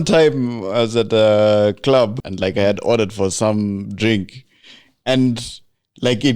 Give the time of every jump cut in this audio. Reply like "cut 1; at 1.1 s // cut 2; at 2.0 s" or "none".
cut 1; at 2.2 s